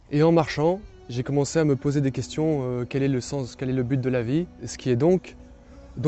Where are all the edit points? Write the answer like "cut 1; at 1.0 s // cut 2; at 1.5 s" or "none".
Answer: cut 1; at 4.7 s